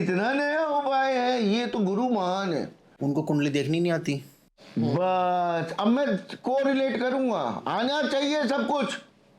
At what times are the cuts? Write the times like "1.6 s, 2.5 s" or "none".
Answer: 3.0 s